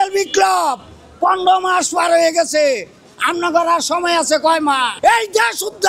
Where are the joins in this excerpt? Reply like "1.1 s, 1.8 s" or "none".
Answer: 5.0 s